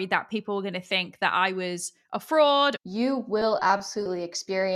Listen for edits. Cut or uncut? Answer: cut